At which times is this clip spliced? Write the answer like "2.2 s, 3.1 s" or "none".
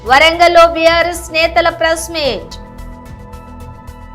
3.0 s

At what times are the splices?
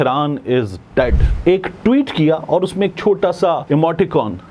1.3 s, 3.6 s

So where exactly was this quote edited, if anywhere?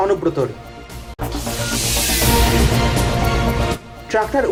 none

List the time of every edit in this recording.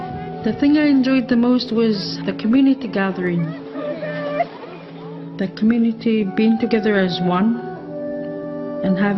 5.7 s

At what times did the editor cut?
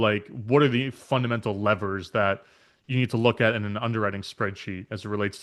none

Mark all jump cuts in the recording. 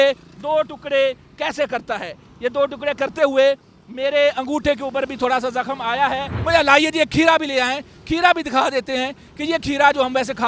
6.3 s

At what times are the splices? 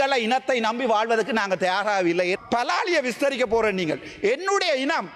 2.4 s

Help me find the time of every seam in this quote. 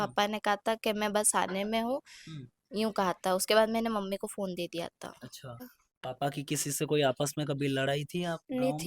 5.7 s

